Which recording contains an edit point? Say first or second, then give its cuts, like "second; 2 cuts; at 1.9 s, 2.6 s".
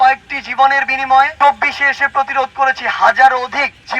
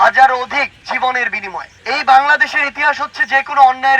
first; 1 cut; at 1.3 s